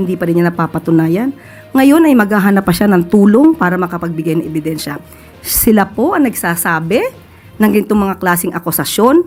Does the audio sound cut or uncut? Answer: uncut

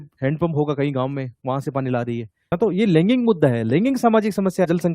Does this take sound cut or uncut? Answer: cut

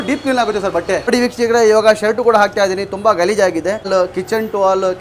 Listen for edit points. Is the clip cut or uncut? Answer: cut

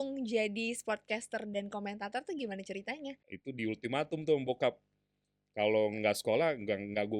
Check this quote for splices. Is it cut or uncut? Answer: cut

